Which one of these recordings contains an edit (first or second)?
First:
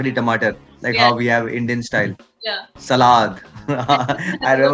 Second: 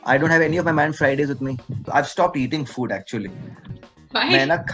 second